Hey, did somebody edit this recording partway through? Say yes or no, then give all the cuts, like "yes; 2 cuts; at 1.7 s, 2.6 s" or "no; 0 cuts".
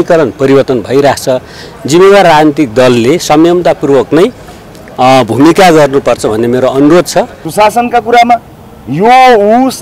yes; 1 cut; at 7.4 s